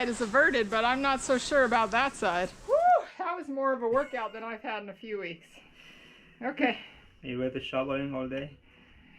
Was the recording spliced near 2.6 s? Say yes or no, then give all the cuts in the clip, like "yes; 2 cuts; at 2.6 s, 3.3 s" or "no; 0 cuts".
yes; 1 cut; at 2.6 s